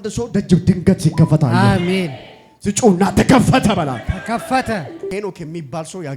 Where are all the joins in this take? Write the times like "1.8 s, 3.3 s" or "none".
5.1 s